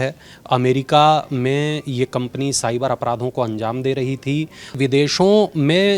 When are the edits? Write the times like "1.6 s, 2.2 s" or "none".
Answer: 4.8 s